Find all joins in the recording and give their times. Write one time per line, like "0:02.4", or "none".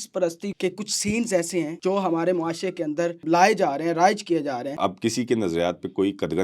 0:01.7
0:03.2
0:04.7